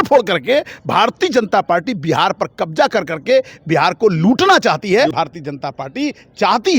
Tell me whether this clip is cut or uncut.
cut